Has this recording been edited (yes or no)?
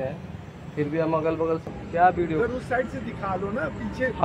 yes